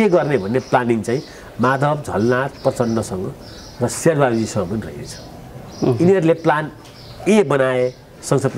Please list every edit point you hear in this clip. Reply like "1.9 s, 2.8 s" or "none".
none